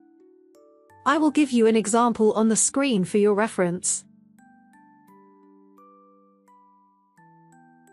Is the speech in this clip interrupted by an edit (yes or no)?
yes